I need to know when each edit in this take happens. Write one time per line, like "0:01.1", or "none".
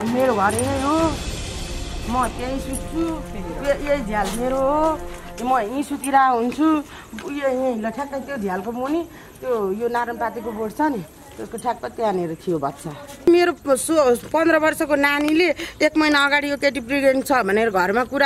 0:13.2